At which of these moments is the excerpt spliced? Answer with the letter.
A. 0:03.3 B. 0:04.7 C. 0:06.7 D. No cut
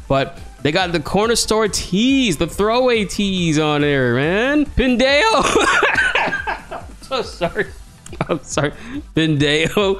B